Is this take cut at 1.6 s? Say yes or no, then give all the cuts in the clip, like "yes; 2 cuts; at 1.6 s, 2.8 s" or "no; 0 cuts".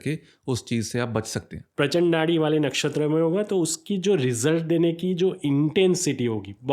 yes; 1 cut; at 1.6 s